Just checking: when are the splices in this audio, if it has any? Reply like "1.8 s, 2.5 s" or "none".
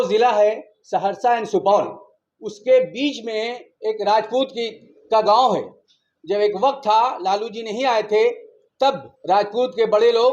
9.1 s

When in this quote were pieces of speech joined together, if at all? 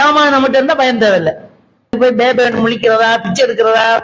2.0 s

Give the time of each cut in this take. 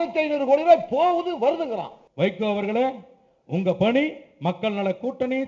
2.0 s

